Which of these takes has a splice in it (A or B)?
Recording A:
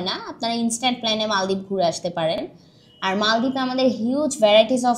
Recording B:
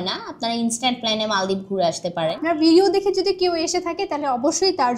B